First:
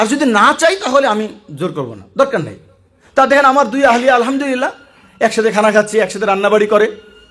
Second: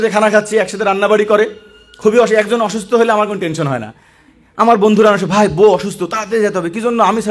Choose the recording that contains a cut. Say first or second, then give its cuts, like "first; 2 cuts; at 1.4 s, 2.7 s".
first; 1 cut; at 3.0 s